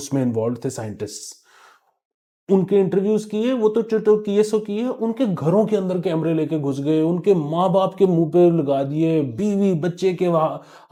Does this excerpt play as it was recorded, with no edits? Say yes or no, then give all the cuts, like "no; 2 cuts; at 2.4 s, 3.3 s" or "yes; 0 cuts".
yes; 0 cuts